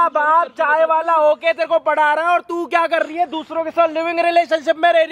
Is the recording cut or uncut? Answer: uncut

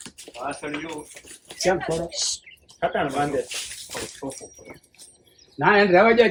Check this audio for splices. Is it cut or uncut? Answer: uncut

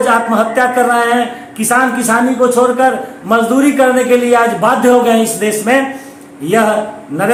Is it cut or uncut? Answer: uncut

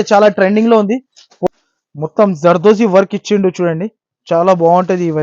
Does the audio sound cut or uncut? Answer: cut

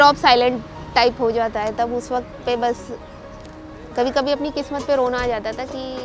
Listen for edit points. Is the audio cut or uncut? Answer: uncut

